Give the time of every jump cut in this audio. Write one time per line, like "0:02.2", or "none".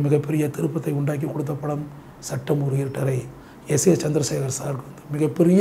none